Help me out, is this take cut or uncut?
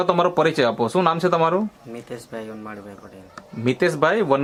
uncut